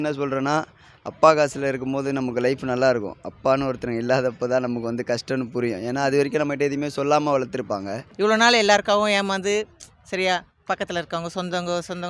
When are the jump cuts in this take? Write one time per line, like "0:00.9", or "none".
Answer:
0:08.0